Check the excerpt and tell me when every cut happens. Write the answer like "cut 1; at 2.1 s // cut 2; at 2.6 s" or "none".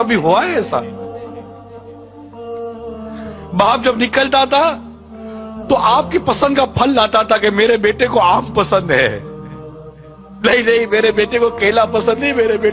none

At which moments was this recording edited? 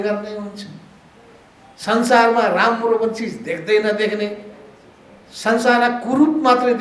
none

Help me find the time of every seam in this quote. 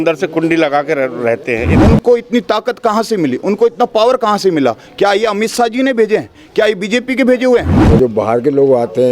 cut 1; at 1.7 s // cut 2; at 7.8 s

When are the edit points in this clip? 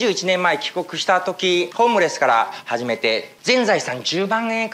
cut 1; at 1.7 s // cut 2; at 3.3 s

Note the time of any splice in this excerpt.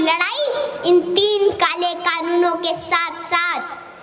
none

